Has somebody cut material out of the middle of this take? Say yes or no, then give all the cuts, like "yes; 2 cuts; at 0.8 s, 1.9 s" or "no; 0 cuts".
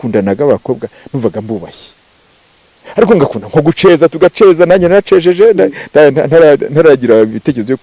no; 0 cuts